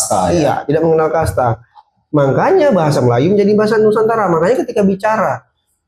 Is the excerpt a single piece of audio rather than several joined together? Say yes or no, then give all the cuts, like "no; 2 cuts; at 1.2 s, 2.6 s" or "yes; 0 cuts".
yes; 0 cuts